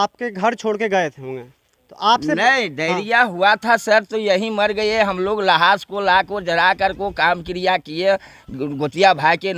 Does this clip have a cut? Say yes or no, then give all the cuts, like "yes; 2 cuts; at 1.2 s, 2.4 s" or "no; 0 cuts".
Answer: no; 0 cuts